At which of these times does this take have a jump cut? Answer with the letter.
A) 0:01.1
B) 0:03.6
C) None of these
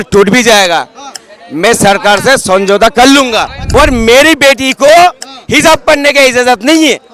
B